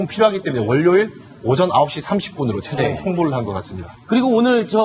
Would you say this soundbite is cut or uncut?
cut